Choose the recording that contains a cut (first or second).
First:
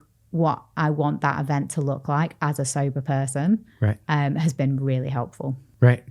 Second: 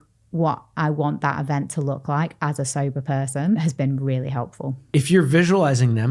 second